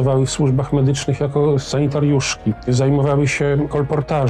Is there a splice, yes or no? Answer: yes